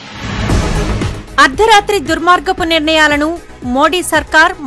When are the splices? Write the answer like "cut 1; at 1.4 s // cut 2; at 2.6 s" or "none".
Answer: cut 1; at 0.9 s

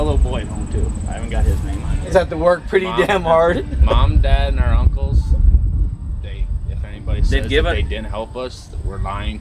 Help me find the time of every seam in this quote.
cut 1; at 2.1 s

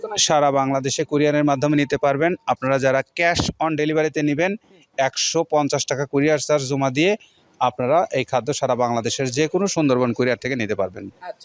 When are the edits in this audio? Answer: none

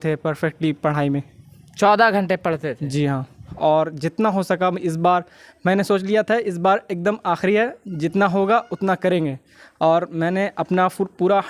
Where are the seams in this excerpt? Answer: cut 1; at 3.4 s

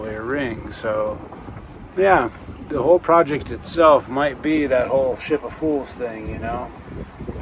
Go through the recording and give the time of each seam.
none

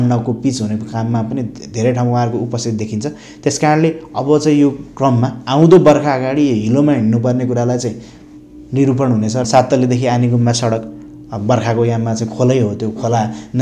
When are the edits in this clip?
cut 1; at 9.5 s

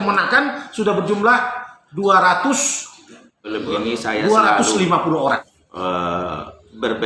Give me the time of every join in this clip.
cut 1; at 5.6 s

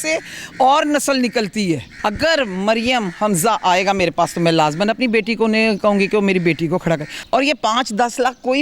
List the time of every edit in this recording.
cut 1; at 1.9 s // cut 2; at 7.1 s

